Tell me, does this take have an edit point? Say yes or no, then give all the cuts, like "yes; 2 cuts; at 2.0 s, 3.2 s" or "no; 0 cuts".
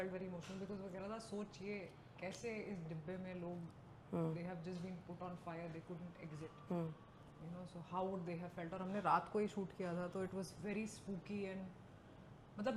no; 0 cuts